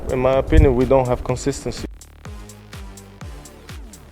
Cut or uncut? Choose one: cut